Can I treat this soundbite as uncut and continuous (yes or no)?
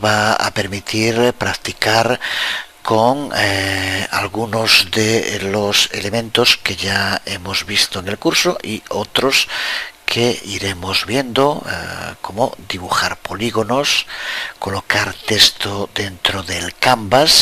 yes